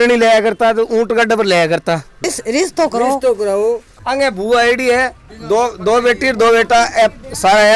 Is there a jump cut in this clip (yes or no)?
yes